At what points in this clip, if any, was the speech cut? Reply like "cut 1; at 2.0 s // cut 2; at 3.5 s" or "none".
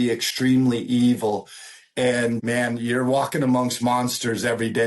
cut 1; at 2.4 s

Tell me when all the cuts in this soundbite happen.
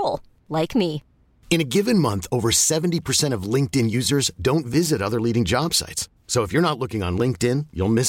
none

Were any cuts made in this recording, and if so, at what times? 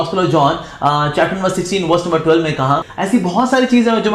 cut 1; at 2.9 s

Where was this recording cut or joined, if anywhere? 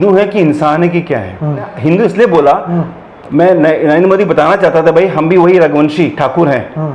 cut 1; at 1.7 s

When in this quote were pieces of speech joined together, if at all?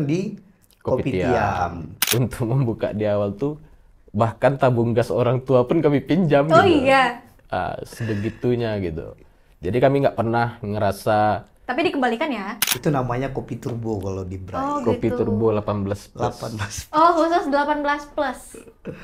cut 1; at 2.0 s // cut 2; at 12.7 s

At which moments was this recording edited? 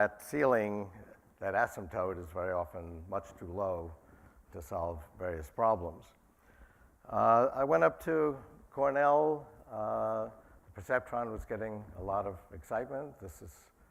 none

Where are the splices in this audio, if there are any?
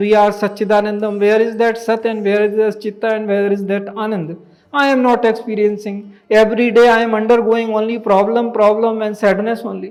none

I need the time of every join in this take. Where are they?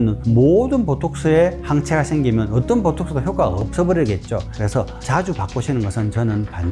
cut 1; at 4.5 s

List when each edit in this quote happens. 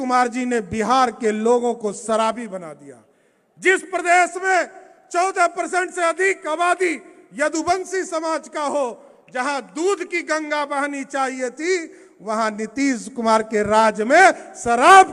none

